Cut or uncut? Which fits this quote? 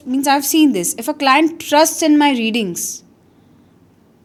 uncut